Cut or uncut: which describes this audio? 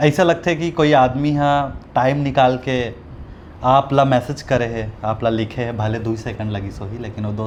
uncut